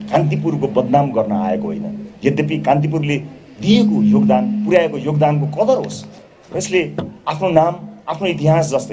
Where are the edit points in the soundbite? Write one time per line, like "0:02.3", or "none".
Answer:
none